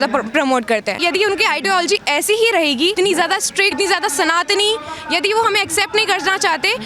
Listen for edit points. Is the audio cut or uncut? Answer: cut